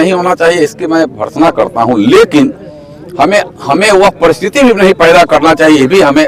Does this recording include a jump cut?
no; 0 cuts

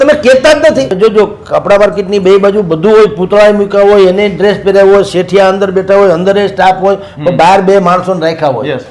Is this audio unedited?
no; 1 cut; at 0.9 s

